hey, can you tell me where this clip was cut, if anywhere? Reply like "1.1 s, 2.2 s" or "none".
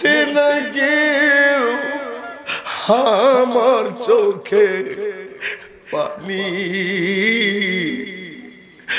none